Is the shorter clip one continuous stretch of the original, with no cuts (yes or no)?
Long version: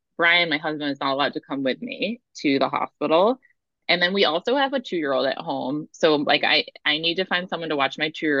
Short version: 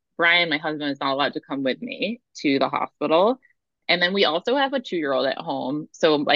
yes